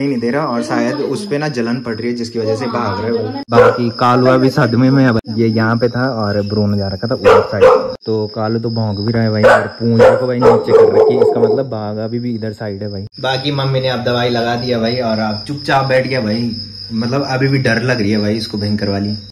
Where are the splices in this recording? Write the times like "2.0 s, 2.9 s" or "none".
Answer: none